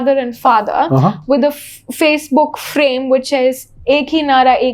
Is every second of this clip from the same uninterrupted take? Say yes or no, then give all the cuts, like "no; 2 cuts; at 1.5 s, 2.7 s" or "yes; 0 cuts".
yes; 0 cuts